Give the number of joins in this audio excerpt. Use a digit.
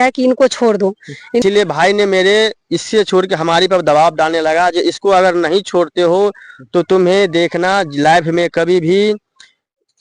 1